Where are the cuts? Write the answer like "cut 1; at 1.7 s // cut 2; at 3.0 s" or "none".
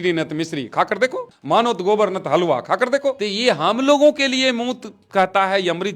cut 1; at 1.3 s // cut 2; at 3.3 s